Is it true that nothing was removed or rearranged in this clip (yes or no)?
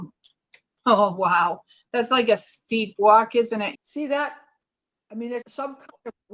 no